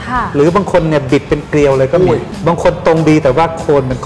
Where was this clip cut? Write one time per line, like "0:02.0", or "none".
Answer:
0:02.3